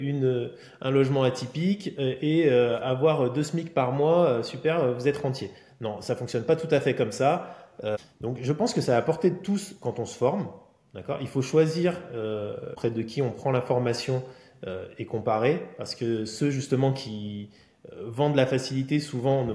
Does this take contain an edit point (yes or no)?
yes